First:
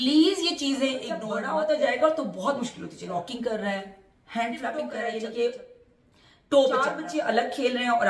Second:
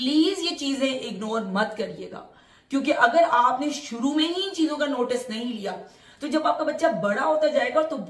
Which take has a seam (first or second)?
first